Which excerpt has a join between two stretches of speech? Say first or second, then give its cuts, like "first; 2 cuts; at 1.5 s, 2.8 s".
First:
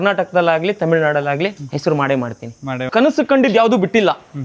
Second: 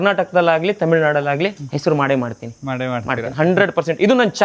first; 1 cut; at 2.9 s